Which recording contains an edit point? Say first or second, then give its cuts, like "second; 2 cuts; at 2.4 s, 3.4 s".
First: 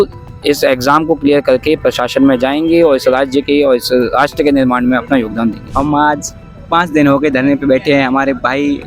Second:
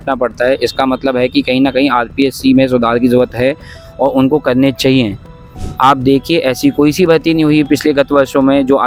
first; 1 cut; at 5.6 s